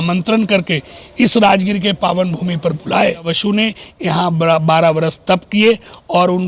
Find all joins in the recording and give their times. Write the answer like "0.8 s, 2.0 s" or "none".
3.3 s